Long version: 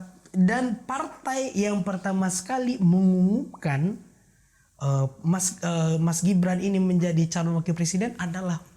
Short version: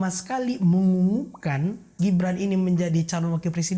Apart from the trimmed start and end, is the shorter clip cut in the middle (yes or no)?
yes